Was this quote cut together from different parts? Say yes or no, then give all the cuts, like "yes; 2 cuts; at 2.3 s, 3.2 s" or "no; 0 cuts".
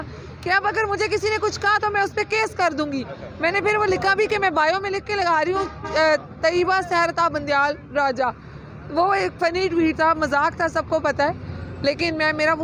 no; 0 cuts